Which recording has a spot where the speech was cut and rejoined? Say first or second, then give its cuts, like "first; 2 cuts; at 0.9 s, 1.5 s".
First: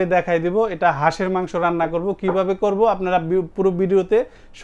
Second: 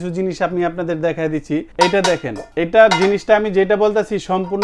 second; 2 cuts; at 1.7 s, 2.4 s